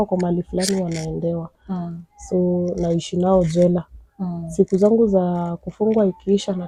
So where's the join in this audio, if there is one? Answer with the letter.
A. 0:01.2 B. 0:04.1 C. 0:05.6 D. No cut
D